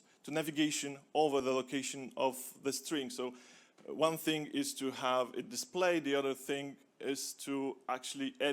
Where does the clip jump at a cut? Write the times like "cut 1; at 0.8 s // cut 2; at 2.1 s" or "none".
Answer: cut 1; at 1.4 s